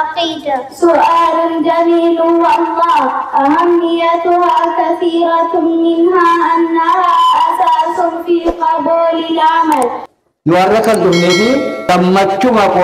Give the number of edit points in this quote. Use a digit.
2